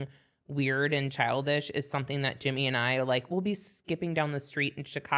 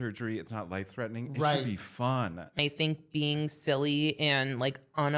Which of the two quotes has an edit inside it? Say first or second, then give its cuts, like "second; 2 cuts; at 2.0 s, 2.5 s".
second; 1 cut; at 2.6 s